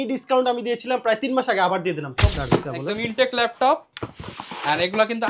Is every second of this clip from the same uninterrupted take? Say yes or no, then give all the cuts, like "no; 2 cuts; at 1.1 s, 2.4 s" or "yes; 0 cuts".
no; 1 cut; at 2.3 s